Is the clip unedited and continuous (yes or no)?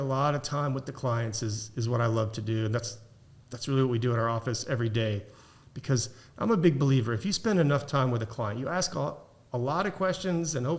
yes